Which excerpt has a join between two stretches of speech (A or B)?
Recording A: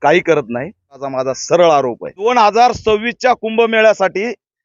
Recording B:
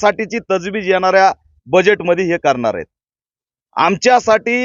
A